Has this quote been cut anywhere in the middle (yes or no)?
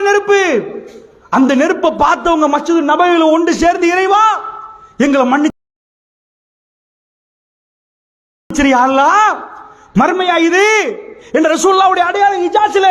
no